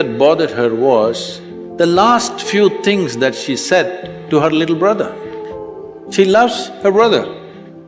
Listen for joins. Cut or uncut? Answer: uncut